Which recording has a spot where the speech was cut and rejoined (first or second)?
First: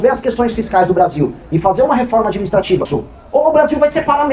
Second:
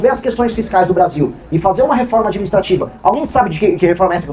first